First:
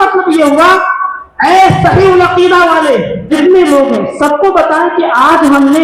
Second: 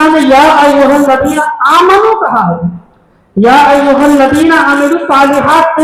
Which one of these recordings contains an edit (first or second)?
first